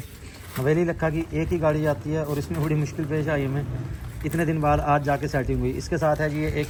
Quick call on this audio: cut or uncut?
uncut